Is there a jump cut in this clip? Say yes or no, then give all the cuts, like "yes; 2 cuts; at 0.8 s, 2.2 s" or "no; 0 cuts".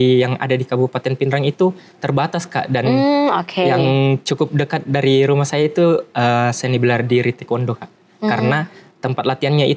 no; 0 cuts